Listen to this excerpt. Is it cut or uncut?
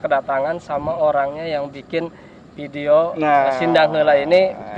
uncut